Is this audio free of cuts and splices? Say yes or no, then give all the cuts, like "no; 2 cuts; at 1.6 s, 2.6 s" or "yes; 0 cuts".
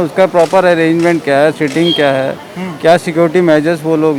yes; 0 cuts